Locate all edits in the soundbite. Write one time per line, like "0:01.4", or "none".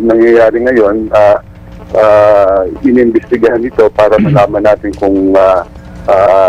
none